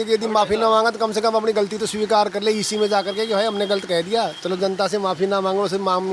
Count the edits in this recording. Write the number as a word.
zero